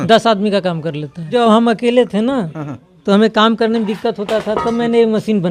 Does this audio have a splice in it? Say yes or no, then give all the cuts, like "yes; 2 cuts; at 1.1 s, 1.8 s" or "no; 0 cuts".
yes; 1 cut; at 1.3 s